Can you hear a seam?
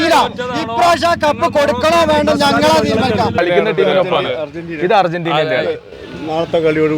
yes; 1 cut; at 3.4 s

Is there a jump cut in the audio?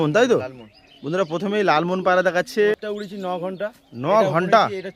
yes; 1 cut; at 2.8 s

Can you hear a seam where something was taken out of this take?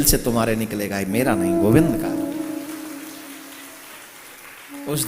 no; 0 cuts

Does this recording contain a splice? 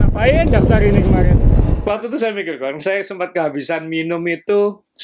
yes; 1 cut; at 1.8 s

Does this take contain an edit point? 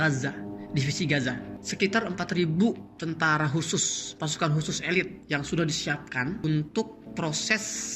yes; 4 cuts; at 1.5 s, 5.2 s, 6.4 s, 7.0 s

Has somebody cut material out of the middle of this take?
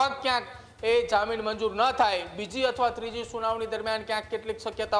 no; 0 cuts

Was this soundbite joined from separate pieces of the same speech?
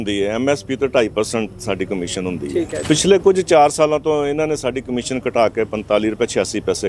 yes; 1 cut; at 2.8 s

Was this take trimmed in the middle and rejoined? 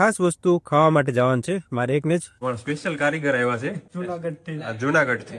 yes; 2 cuts; at 2.3 s, 3.9 s

